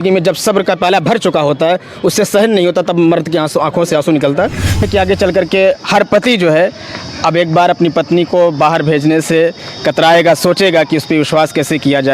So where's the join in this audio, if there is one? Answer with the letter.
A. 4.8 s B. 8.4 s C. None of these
A